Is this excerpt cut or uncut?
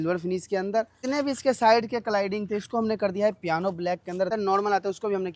cut